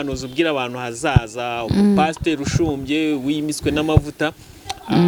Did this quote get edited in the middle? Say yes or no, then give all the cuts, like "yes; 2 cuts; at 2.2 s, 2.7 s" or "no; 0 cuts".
no; 0 cuts